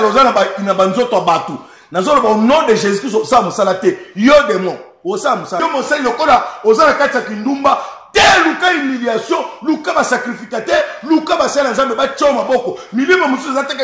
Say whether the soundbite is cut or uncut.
cut